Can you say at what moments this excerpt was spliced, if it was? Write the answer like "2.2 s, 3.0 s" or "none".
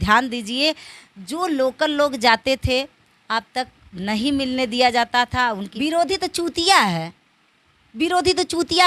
5.7 s